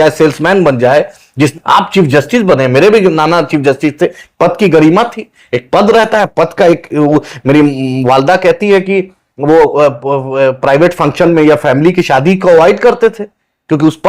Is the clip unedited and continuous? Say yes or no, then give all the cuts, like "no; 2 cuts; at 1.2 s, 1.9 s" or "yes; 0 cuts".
no; 1 cut; at 1.5 s